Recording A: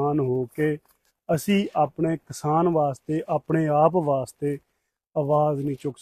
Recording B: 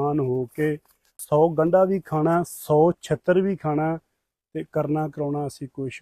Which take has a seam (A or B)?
B